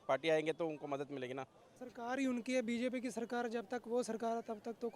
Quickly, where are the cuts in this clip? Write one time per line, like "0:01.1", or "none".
0:01.7